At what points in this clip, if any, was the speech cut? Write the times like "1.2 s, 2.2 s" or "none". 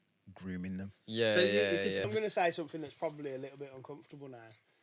2.1 s